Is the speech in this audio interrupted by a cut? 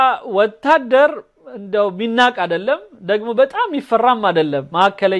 no; 0 cuts

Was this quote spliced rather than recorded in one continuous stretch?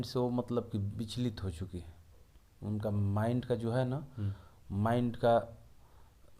no; 0 cuts

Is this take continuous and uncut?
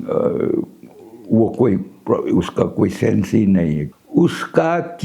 no; 1 cut; at 3.8 s

